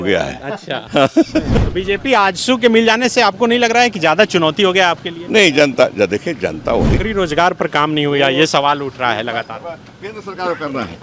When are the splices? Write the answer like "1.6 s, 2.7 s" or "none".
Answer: 1.5 s, 7.0 s